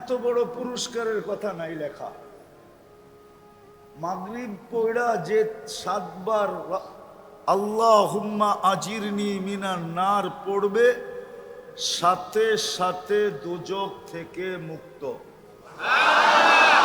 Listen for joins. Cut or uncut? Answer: uncut